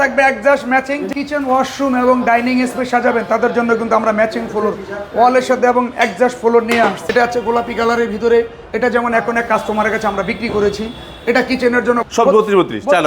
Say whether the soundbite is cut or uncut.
cut